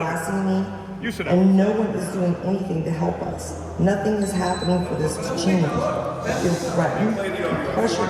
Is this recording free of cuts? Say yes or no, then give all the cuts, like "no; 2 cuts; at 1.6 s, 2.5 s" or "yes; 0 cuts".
yes; 0 cuts